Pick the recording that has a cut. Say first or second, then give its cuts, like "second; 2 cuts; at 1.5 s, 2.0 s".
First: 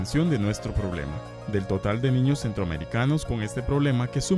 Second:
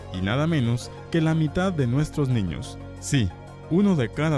second; 1 cut; at 2.6 s